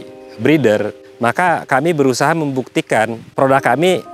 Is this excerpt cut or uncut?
cut